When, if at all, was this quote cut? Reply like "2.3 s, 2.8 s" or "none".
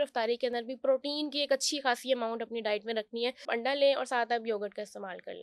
3.5 s